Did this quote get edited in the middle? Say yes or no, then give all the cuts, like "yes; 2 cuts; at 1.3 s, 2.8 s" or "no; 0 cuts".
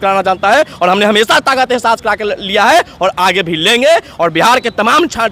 no; 0 cuts